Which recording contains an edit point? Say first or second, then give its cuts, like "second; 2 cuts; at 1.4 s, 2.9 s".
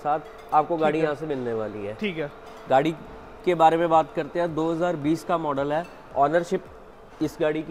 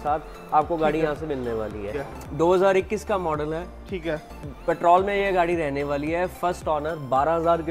second; 1 cut; at 2.0 s